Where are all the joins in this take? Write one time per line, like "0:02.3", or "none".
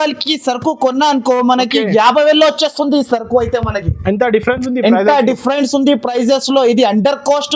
none